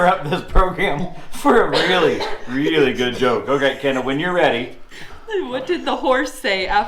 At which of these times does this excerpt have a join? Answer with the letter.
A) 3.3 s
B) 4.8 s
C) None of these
C